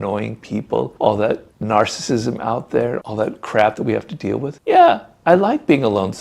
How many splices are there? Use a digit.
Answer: 1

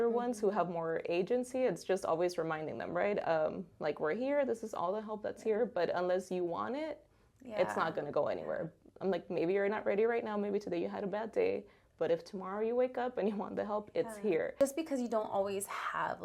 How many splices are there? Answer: 1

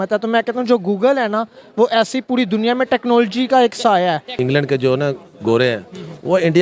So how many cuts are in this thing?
1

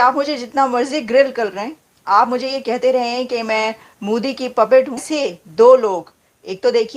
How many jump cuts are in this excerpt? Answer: 0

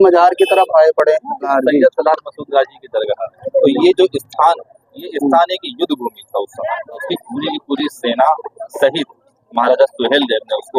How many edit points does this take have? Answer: 3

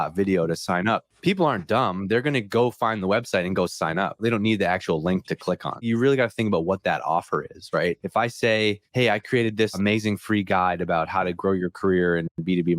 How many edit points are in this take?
6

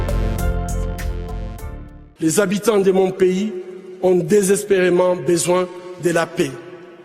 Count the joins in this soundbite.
0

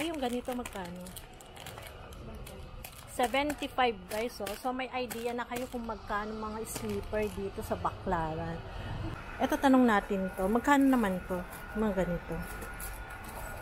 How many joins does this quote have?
1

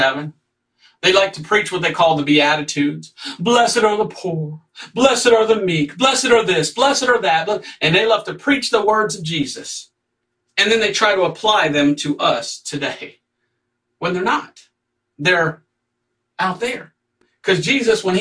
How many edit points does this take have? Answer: 0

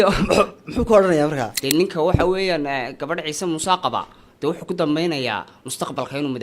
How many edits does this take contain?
1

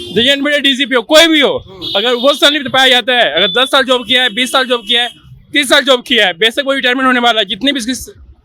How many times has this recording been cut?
0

